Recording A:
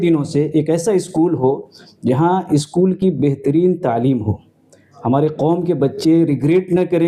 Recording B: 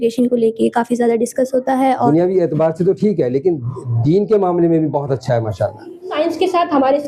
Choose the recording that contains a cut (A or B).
B